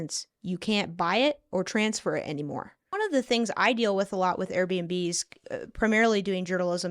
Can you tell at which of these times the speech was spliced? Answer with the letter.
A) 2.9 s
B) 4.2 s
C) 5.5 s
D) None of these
A